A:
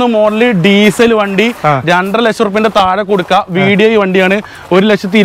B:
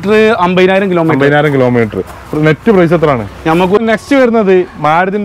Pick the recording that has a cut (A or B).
B